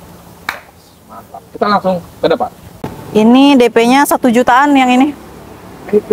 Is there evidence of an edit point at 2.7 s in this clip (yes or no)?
yes